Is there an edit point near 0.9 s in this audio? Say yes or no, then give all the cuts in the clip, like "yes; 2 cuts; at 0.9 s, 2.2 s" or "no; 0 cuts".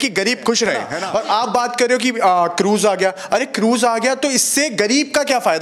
yes; 1 cut; at 0.9 s